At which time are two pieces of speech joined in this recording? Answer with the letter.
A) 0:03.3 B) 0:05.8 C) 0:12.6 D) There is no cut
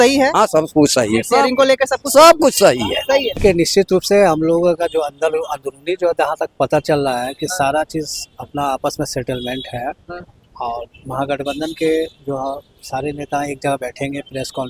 A